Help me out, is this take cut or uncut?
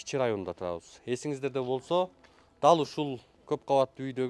cut